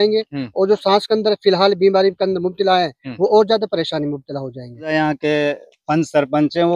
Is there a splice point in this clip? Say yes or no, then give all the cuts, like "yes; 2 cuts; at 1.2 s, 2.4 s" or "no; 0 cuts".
yes; 1 cut; at 4.9 s